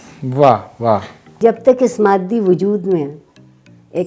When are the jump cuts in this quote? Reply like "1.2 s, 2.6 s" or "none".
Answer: 1.4 s